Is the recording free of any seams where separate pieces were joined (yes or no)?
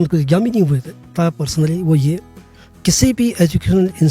no